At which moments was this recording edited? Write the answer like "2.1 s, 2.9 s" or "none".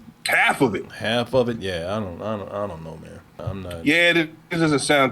3.3 s